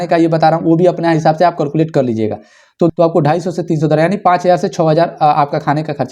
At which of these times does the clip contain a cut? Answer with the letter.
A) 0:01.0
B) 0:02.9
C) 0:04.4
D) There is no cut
B